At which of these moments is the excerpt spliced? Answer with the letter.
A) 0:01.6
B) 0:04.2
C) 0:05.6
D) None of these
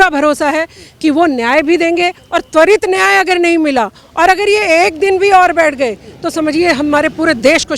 D